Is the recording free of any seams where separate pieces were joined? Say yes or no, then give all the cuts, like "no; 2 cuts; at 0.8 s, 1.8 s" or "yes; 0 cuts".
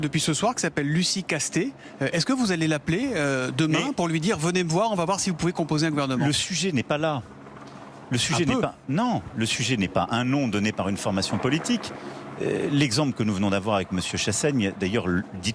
no; 1 cut; at 9.3 s